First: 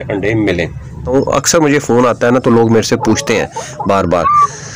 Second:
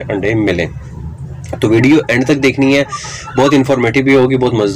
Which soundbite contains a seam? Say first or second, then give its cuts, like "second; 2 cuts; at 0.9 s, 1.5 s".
first; 1 cut; at 1.1 s